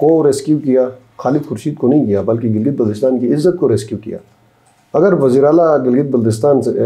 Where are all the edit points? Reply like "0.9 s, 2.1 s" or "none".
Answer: none